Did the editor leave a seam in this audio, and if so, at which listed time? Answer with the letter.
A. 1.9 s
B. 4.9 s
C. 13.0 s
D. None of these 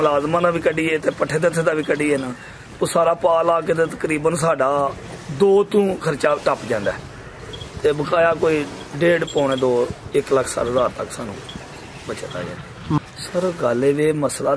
C